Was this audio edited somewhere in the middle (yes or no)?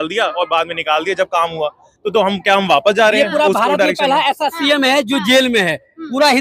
no